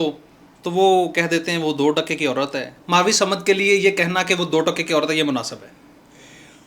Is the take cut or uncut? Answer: cut